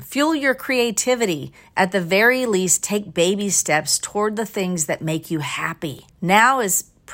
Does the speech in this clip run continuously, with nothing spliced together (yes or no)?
no